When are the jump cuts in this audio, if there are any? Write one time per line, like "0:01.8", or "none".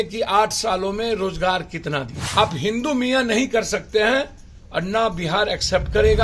0:02.2